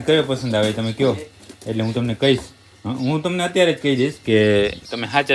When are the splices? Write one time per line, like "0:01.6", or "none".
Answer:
none